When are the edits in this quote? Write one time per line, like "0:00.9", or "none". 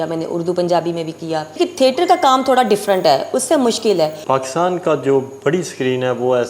0:01.6
0:04.2